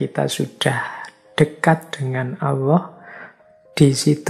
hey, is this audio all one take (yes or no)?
yes